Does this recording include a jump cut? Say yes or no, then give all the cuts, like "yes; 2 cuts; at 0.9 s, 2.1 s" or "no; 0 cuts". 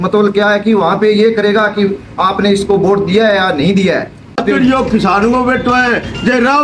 yes; 1 cut; at 4.3 s